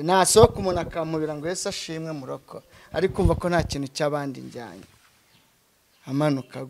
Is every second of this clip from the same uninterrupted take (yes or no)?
yes